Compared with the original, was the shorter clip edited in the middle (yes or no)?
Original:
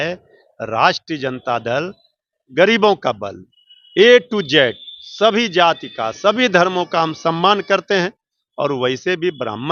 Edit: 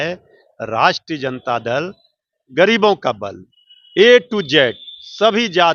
no